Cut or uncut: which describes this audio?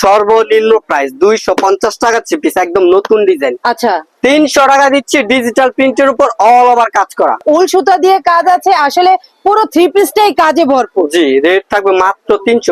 cut